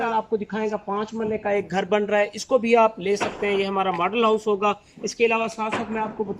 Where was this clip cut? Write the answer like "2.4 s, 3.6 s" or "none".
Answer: none